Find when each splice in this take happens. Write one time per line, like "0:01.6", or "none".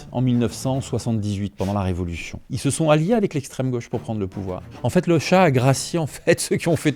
0:02.4
0:04.7